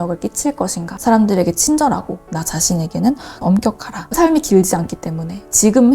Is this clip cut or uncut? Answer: cut